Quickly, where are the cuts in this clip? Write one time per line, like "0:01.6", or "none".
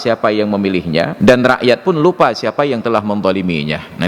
0:01.1